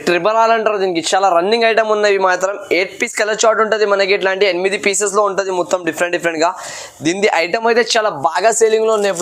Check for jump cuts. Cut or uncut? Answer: uncut